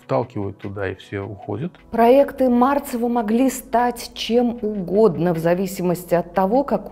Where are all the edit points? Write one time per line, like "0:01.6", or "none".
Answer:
0:01.8